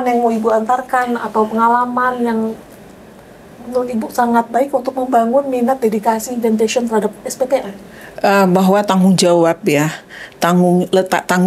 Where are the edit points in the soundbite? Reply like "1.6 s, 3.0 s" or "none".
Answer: none